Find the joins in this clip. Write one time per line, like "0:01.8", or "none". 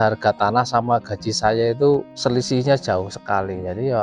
0:02.1